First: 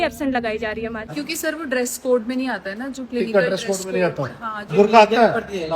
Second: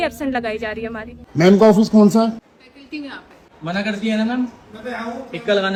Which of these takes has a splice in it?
first; 2 cuts; at 1.0 s, 4.7 s

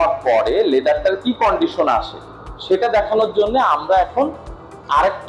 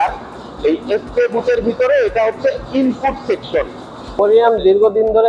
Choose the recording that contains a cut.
second; 1 cut; at 4.1 s

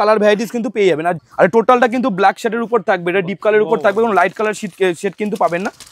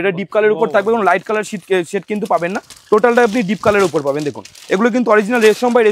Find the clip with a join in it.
first; 1 cut; at 1.2 s

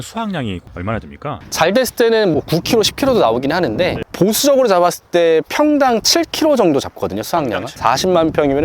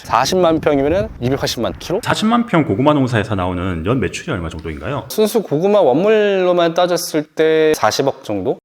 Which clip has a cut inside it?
second; 2 cuts; at 2.0 s, 7.7 s

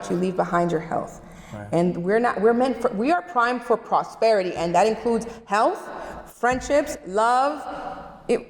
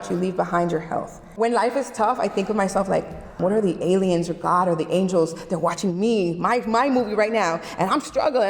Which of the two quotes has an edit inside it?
second; 2 cuts; at 1.2 s, 3.2 s

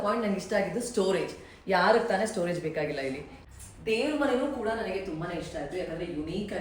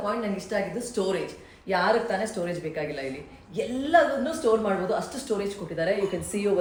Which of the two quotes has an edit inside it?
first; 1 cut; at 3.3 s

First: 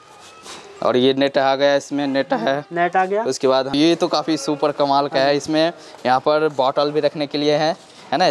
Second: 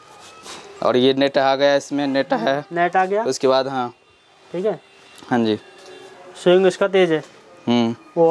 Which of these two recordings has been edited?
first; 1 cut; at 3.7 s

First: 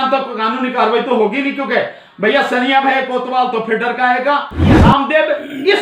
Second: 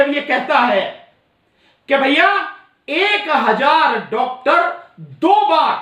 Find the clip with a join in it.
first; 1 cut; at 4.7 s

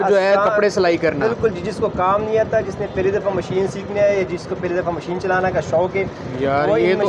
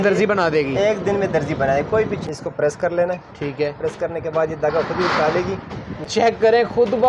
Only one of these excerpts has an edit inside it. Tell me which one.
second; 2 cuts; at 2.2 s, 6.1 s

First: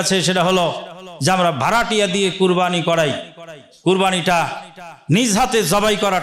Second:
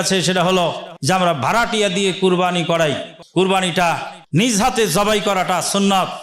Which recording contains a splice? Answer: second; 3 cuts; at 0.9 s, 3.1 s, 4.1 s

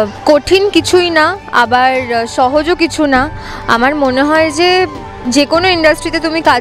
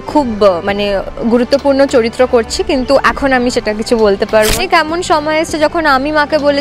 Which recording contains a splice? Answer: second; 1 cut; at 4.6 s

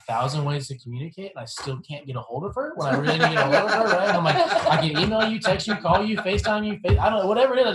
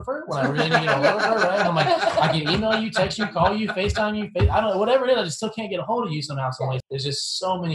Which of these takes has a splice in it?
second; 1 cut; at 6.8 s

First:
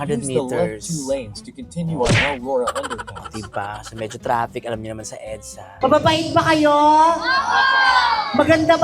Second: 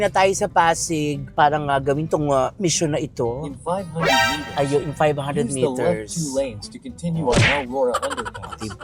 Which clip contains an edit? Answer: first; 1 cut; at 5.8 s

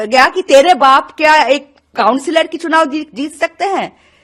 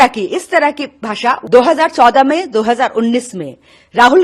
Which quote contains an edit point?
second; 1 cut; at 1.4 s

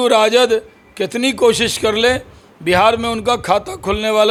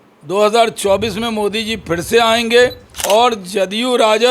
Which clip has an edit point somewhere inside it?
second; 1 cut; at 2.9 s

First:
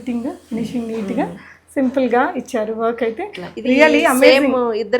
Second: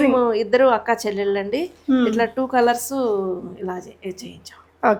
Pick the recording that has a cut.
first; 1 cut; at 3.4 s

